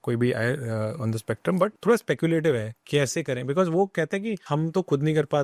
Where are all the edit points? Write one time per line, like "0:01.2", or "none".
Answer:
0:01.8
0:04.4